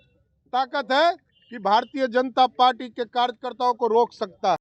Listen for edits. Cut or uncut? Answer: uncut